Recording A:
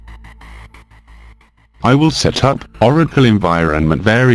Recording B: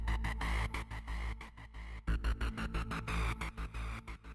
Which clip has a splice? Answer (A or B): A